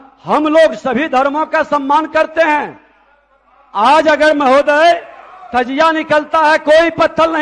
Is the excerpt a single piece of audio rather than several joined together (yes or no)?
yes